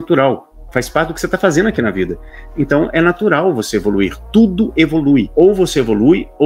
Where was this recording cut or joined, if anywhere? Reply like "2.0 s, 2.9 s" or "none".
5.3 s